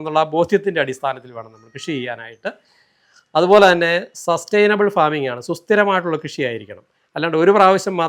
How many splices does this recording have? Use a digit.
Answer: 0